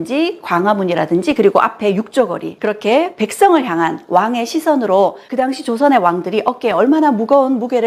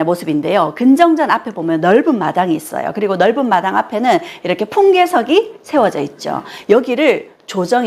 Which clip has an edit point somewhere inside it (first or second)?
first